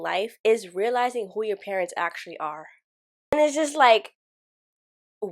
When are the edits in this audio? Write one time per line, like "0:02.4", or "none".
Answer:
0:03.3